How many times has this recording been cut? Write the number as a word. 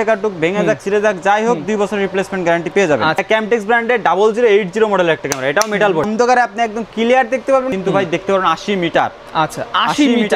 three